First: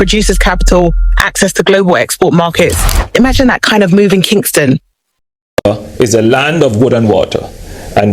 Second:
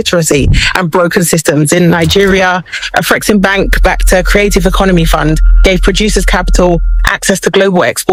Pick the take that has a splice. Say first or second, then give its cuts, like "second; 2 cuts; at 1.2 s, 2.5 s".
first; 1 cut; at 5.2 s